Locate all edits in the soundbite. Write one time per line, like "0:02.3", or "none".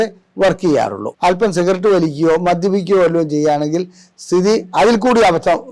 0:01.1